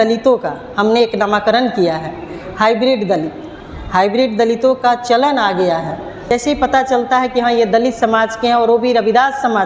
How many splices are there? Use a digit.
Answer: 1